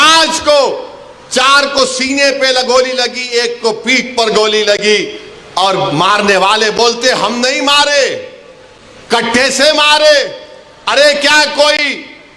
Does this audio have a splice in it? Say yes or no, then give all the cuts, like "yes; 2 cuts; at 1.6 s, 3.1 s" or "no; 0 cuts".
no; 0 cuts